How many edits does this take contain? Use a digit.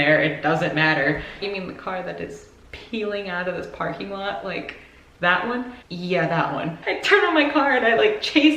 3